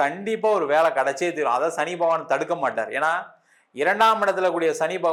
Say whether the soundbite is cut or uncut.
uncut